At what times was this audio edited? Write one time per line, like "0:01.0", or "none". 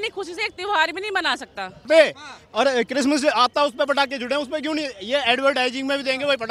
0:01.8